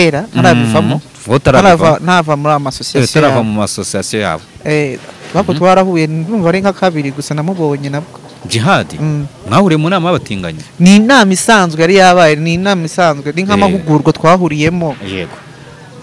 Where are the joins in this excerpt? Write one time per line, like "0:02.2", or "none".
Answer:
none